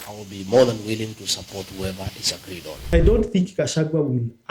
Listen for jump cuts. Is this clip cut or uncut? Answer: cut